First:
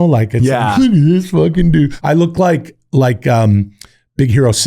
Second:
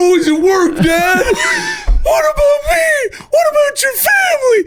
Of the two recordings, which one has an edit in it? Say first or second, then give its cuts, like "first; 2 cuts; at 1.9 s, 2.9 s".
first; 1 cut; at 1.9 s